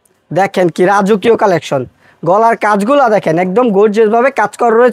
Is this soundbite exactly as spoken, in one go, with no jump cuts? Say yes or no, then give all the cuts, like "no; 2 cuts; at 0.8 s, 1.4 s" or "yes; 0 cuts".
yes; 0 cuts